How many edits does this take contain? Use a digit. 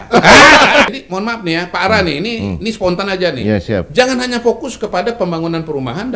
1